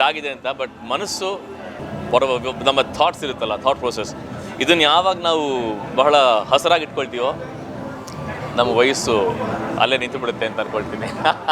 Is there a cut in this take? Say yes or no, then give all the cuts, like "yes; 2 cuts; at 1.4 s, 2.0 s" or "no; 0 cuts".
no; 0 cuts